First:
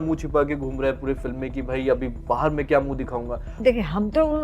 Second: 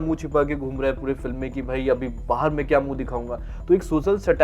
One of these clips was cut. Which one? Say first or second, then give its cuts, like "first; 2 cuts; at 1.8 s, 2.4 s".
first; 1 cut; at 3.5 s